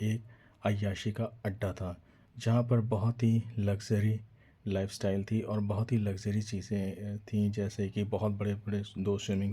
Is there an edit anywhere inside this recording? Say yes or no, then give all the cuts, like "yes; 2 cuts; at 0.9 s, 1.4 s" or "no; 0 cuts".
no; 0 cuts